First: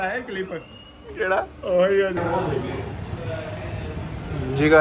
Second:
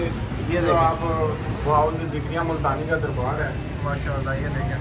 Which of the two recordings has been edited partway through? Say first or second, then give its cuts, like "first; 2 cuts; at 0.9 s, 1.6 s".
first; 1 cut; at 2.2 s